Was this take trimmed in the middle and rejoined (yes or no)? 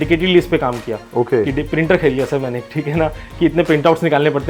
no